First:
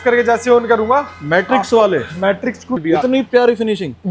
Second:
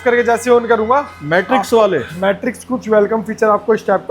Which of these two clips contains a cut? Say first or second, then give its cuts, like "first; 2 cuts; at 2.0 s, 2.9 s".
first; 1 cut; at 2.8 s